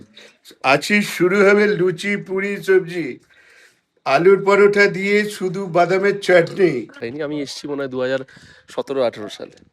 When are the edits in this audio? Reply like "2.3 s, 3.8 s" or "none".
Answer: 7.0 s